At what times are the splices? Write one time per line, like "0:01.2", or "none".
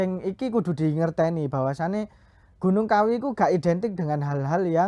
none